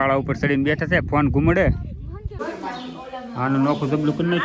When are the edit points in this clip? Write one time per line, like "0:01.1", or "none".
0:02.2

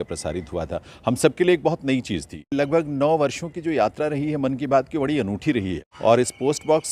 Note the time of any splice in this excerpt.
0:02.5
0:05.8

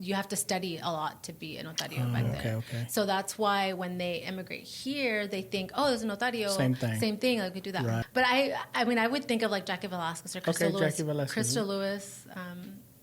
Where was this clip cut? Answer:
0:08.0

